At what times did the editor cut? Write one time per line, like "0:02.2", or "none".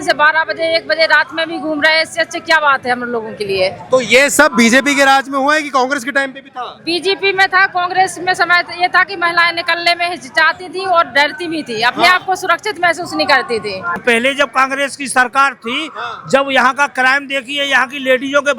0:14.0